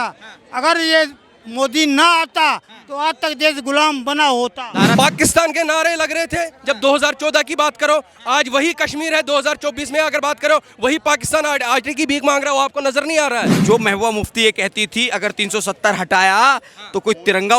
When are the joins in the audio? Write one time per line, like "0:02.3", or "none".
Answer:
0:04.9
0:13.5

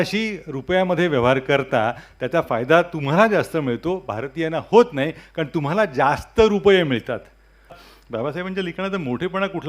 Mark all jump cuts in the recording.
0:07.8

